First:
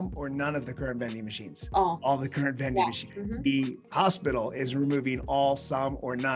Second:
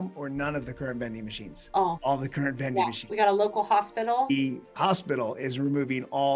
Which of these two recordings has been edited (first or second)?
second